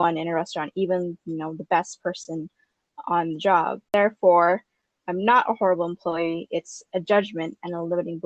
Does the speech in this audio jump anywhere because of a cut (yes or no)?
yes